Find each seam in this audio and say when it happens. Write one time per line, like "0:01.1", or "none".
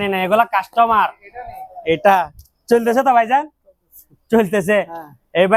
none